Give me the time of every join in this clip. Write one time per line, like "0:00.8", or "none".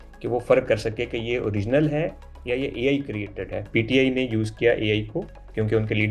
0:03.7

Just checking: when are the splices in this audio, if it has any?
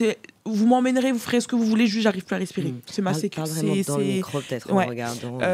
none

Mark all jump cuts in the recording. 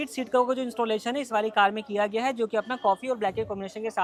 none

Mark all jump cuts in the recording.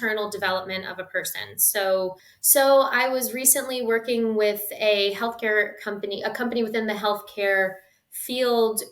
0:02.3

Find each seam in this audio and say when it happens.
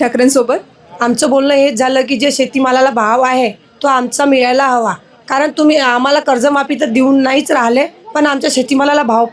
none

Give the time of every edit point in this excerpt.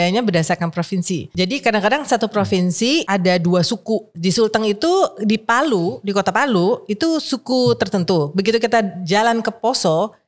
0:01.3
0:03.1
0:04.1

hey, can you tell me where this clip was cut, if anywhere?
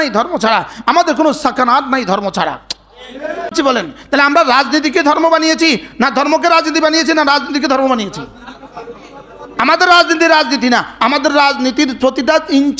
0:03.5

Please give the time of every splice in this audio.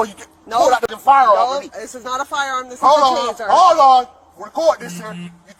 0:00.9

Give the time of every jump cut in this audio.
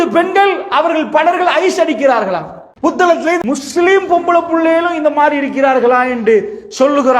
0:03.0

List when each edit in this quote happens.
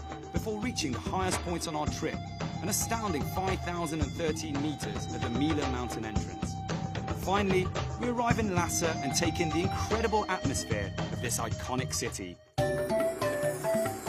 none

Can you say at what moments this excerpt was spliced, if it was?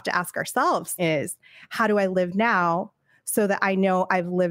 0:00.9

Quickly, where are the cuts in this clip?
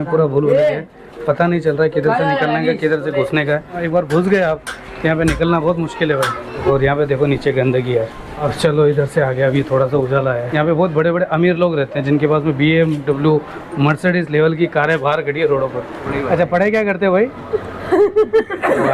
0:03.8
0:06.6
0:10.5
0:16.1

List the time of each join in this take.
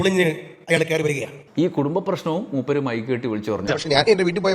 0:01.4
0:03.6

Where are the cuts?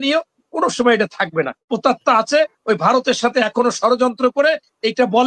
0:01.7

